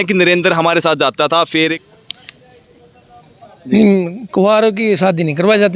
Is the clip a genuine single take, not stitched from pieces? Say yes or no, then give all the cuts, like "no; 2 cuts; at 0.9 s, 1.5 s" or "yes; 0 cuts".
no; 1 cut; at 1.7 s